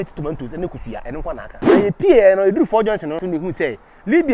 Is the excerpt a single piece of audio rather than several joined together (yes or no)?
no